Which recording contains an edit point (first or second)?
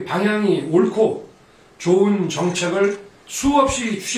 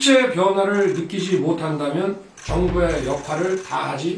second